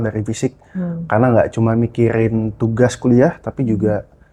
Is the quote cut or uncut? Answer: uncut